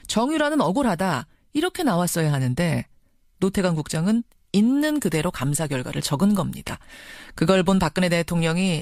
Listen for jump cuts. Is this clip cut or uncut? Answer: uncut